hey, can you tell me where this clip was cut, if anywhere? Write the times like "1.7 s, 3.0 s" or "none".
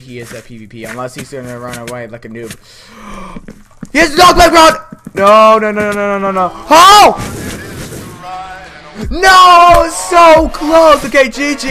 none